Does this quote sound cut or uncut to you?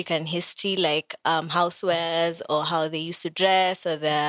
uncut